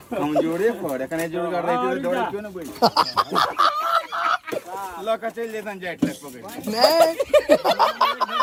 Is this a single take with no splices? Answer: yes; 0 cuts

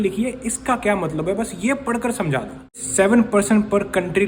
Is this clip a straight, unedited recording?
yes; 0 cuts

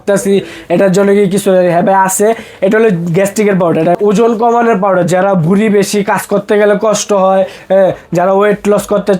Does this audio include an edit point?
yes; 1 cut; at 3.9 s

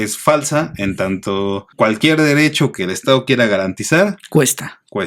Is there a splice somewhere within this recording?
yes; 1 cut; at 1.7 s

